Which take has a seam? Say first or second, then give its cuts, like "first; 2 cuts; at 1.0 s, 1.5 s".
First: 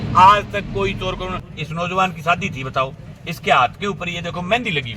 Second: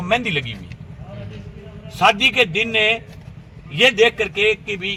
first; 1 cut; at 1.5 s